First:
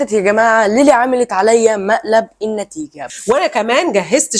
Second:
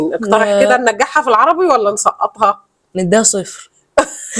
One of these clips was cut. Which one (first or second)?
first